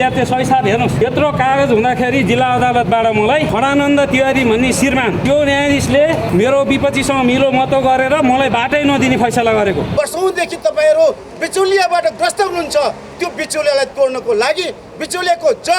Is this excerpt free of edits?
no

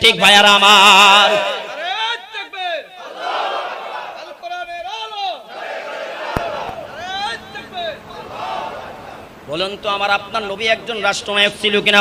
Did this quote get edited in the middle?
no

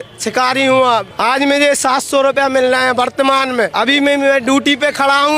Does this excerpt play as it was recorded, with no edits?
no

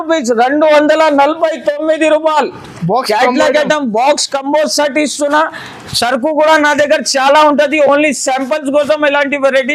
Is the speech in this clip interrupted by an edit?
no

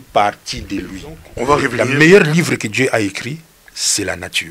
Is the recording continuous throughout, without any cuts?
no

